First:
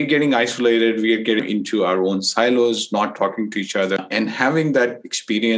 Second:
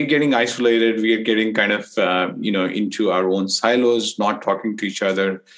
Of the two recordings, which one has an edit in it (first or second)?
first